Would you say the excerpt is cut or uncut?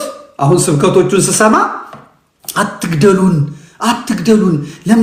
uncut